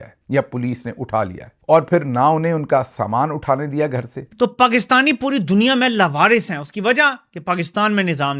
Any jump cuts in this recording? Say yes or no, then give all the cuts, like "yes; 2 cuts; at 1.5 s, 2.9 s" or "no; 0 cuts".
yes; 1 cut; at 4.2 s